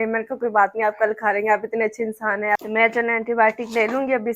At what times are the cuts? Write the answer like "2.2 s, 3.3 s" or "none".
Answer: 2.6 s